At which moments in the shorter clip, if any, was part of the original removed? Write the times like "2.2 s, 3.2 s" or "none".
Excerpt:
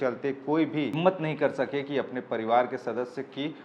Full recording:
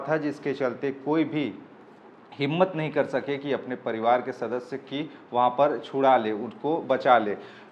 0.9 s